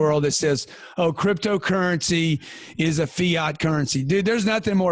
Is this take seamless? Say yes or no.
yes